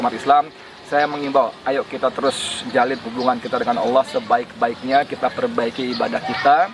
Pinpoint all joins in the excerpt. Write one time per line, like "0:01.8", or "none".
none